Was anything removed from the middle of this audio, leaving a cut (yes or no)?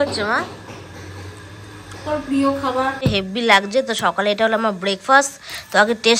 yes